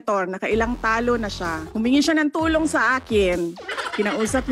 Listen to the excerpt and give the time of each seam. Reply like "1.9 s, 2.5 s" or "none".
1.7 s, 3.6 s